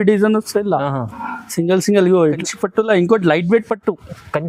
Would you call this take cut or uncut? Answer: cut